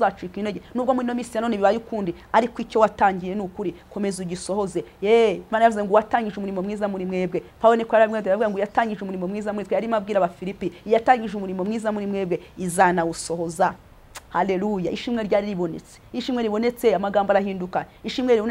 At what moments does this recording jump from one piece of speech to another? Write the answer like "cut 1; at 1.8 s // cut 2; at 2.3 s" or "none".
cut 1; at 13.9 s